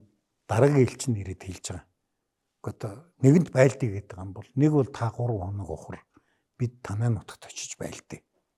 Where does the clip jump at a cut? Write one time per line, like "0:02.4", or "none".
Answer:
none